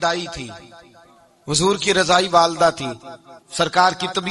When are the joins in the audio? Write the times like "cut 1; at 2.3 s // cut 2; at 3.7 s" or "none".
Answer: none